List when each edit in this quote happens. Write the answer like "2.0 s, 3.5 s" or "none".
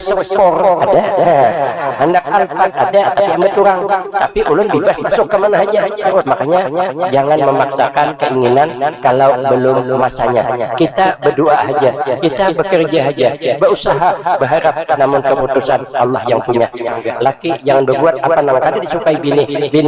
6.0 s, 16.9 s

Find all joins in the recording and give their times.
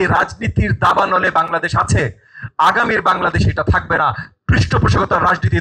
none

